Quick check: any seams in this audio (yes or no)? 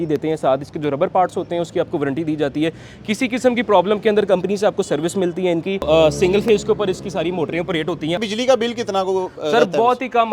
yes